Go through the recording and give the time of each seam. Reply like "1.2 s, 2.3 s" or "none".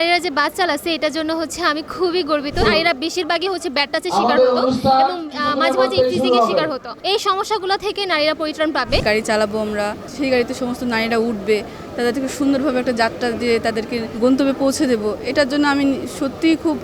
2.6 s, 6.9 s, 9.0 s, 10.0 s, 14.1 s